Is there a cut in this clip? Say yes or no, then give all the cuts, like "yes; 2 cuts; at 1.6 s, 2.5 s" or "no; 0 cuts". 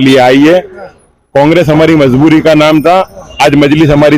no; 0 cuts